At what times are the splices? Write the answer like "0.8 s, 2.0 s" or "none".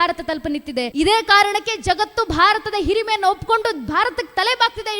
0.9 s

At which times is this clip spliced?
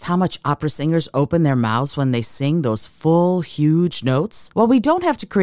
4.4 s

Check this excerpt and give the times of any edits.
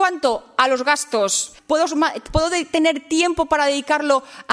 1.5 s

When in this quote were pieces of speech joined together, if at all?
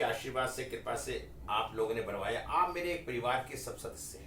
1.4 s

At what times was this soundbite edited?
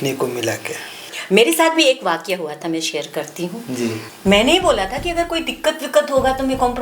1.1 s, 4.1 s

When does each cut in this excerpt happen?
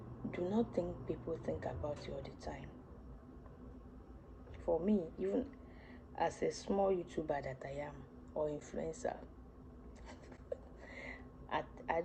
none

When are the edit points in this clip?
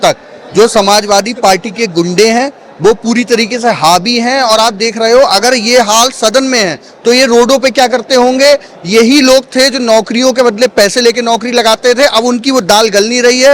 none

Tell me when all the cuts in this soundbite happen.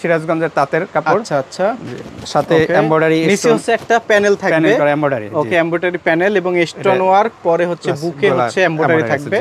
none

